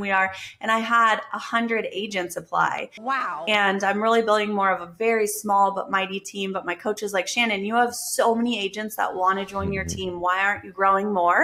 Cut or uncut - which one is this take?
uncut